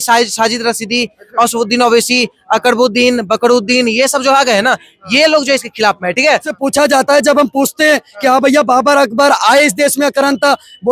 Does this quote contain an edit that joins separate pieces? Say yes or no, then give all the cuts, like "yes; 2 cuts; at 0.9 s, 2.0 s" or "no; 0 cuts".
yes; 1 cut; at 6.5 s